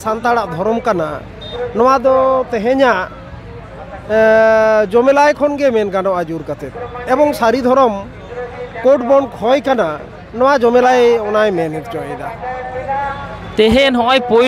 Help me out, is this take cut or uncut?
uncut